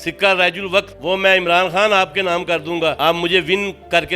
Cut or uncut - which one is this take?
cut